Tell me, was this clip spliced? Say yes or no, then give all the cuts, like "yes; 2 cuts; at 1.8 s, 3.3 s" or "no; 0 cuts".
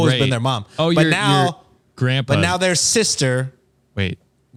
no; 0 cuts